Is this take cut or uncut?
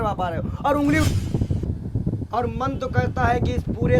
cut